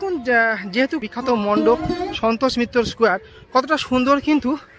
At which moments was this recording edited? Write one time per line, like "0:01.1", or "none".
0:01.0